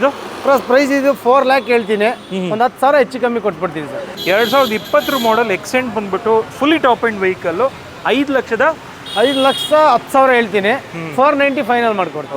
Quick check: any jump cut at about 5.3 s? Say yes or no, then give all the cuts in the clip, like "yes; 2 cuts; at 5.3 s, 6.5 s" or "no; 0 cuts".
no; 1 cut; at 4.1 s